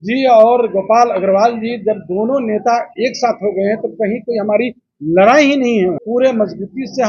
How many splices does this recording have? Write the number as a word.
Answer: one